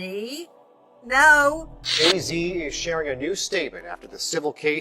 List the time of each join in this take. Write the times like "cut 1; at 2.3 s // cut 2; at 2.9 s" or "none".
cut 1; at 1.8 s

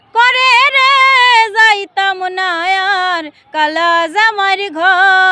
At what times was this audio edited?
none

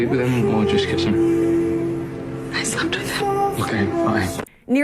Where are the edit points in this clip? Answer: cut 1; at 3.6 s

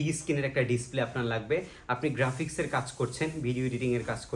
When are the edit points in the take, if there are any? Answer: none

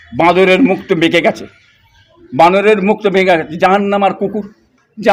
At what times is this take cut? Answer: none

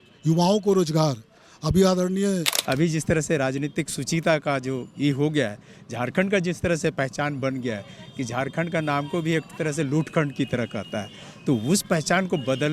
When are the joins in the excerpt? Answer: cut 1; at 2.5 s

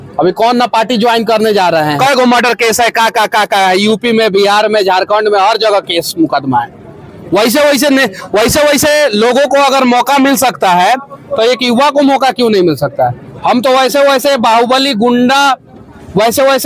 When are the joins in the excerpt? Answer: none

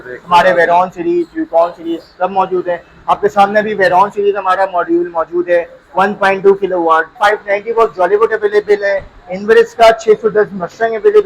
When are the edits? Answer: cut 1; at 7.1 s

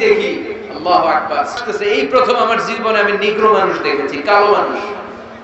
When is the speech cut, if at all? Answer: cut 1; at 1.6 s

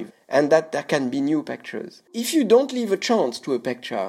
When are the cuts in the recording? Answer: cut 1; at 2.2 s

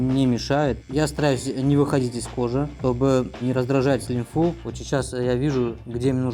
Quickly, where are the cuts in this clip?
cut 1; at 0.8 s // cut 2; at 4.6 s

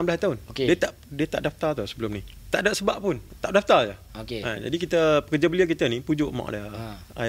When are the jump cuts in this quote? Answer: cut 1; at 2.3 s // cut 2; at 3.3 s

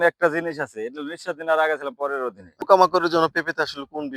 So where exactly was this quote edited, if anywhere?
cut 1; at 2.7 s

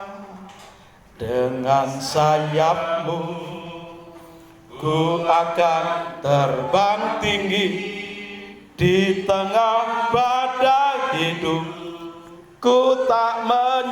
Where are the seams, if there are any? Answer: none

